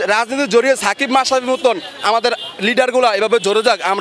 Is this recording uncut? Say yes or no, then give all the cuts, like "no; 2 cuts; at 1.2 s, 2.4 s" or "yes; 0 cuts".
yes; 0 cuts